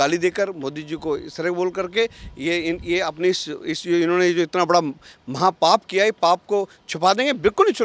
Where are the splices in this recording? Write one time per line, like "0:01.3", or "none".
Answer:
none